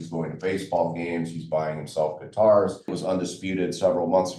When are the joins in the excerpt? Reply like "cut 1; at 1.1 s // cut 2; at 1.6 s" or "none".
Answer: cut 1; at 3.0 s